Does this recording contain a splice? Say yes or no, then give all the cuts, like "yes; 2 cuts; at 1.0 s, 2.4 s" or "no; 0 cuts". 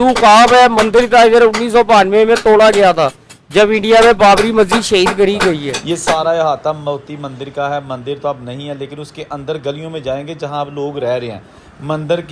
yes; 1 cut; at 5.7 s